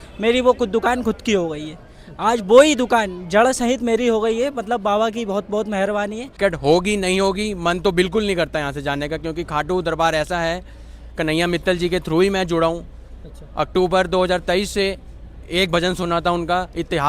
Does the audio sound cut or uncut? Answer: cut